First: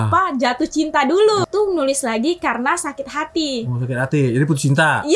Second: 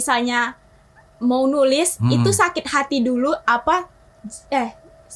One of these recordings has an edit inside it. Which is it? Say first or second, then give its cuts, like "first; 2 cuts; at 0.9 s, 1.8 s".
first; 1 cut; at 1.4 s